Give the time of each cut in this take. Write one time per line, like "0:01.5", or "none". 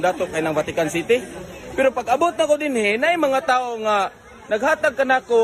0:03.6